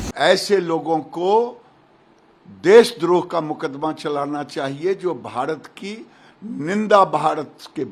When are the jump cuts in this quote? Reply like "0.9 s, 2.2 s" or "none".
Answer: none